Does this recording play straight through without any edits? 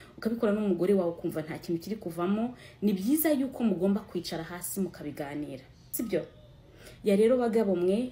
no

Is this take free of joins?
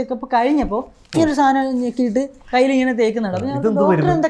yes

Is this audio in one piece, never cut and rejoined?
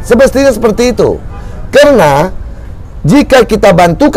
yes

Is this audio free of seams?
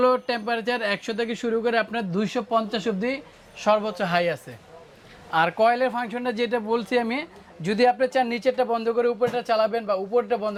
yes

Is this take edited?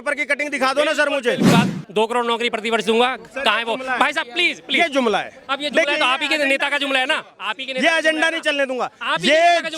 yes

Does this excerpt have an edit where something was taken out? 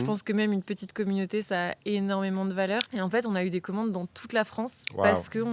yes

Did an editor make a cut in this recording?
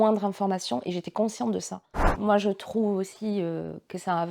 yes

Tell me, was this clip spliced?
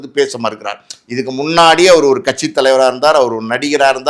no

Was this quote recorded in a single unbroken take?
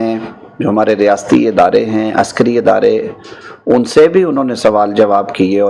yes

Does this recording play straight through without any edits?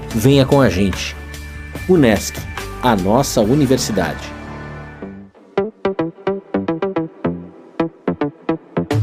no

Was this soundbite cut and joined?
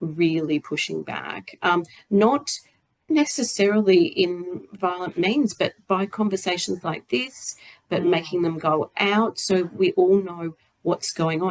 no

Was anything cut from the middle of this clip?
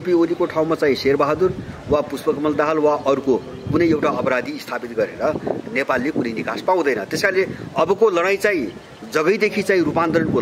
no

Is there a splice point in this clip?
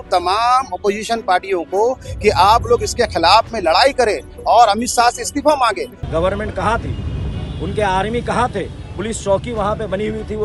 yes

